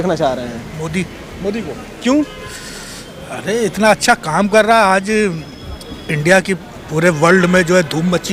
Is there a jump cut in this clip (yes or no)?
no